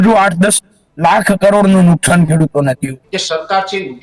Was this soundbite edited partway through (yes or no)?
yes